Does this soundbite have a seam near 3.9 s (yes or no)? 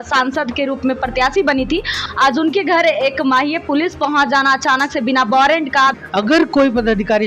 no